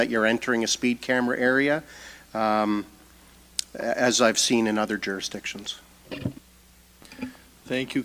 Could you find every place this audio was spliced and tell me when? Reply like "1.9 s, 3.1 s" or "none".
none